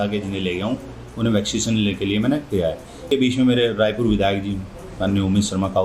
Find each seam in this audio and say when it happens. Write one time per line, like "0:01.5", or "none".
0:03.1